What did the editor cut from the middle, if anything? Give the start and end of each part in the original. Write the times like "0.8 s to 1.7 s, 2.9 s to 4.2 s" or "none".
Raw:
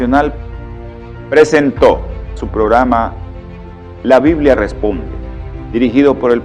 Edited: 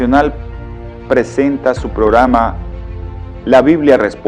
1.3 s to 1.9 s